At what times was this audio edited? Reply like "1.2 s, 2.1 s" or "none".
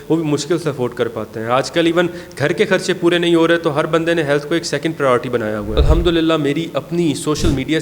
5.8 s